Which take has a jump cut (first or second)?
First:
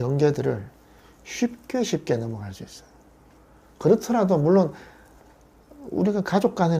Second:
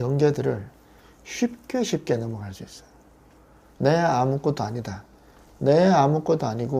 second